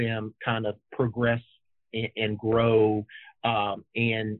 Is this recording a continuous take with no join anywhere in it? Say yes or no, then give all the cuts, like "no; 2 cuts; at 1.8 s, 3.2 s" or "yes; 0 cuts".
yes; 0 cuts